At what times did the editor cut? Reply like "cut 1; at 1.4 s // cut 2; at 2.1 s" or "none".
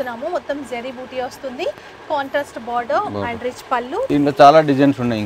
cut 1; at 4.0 s